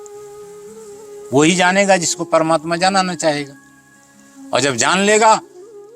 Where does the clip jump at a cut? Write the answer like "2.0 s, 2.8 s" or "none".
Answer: 1.3 s